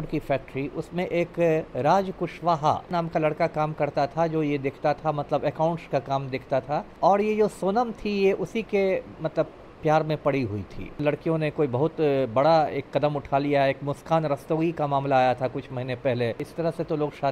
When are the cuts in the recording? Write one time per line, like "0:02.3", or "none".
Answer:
0:02.9
0:06.9
0:11.0
0:16.5